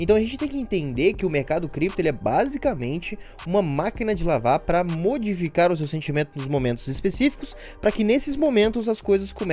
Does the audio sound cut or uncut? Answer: uncut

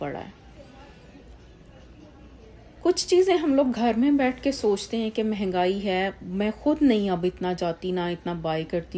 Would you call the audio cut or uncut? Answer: uncut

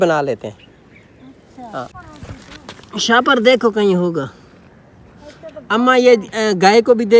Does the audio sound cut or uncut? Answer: cut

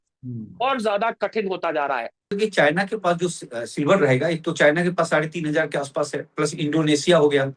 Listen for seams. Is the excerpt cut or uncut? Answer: cut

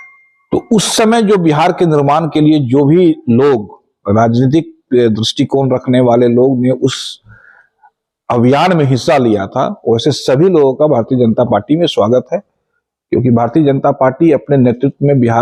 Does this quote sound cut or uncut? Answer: uncut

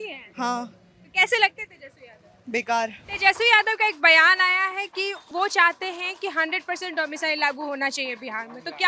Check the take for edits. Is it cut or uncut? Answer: cut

